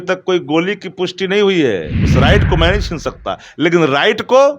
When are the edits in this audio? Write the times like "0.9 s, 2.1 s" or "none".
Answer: 2.0 s